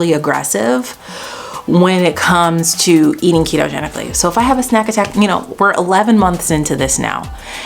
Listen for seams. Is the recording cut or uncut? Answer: uncut